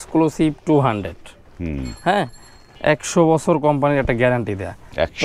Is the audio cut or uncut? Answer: uncut